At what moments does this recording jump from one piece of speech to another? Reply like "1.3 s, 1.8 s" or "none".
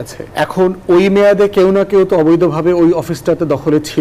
none

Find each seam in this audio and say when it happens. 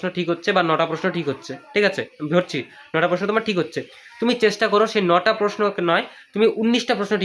none

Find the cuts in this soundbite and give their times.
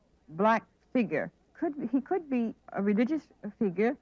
1.4 s, 2.7 s

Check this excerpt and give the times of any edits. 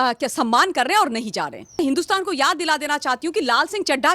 1.8 s

